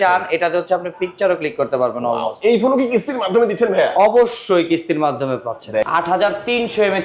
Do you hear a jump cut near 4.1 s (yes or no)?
no